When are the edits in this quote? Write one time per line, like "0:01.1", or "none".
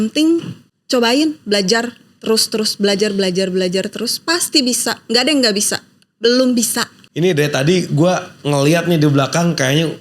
0:07.0